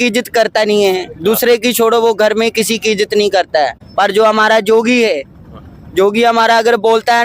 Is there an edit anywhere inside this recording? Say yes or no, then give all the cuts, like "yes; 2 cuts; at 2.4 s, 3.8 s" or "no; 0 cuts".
yes; 1 cut; at 3.8 s